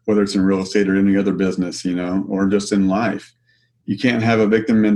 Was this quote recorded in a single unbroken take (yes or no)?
yes